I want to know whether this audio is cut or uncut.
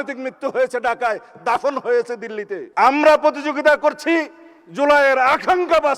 cut